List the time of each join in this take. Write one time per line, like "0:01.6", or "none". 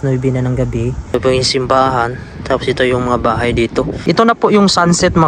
0:01.1
0:04.0

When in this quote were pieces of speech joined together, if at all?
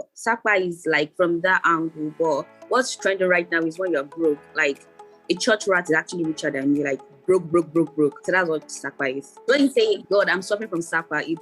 0:08.8

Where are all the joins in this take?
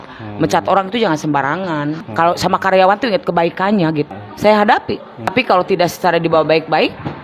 0:02.1
0:04.1
0:05.3

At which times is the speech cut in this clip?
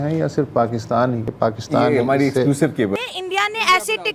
0:01.3
0:03.0

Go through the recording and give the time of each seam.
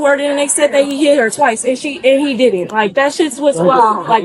none

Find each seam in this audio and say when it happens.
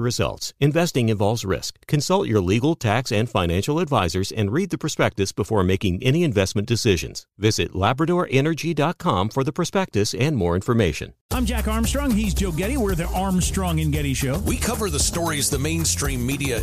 0:11.1

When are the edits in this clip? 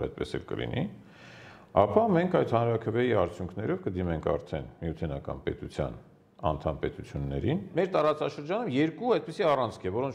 0:07.7

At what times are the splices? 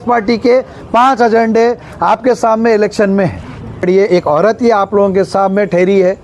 0:03.8

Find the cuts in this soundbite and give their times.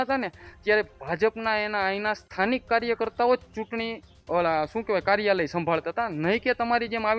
none

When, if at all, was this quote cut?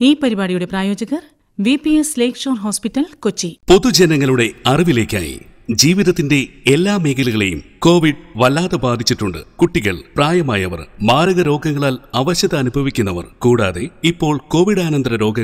0:03.5

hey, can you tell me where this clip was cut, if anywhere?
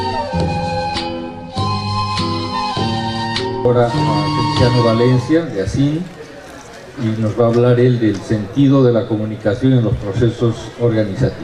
0:09.8

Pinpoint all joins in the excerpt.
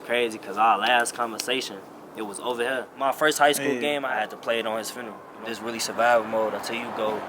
0:02.9
0:04.1
0:05.3

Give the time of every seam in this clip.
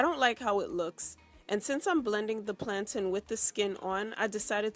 0:02.0

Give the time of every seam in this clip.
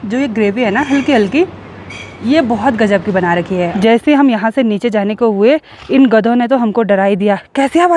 0:03.7

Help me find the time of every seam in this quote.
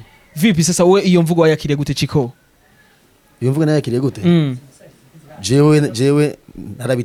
none

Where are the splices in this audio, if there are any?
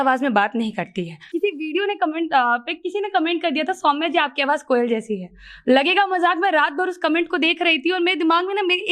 0:01.2

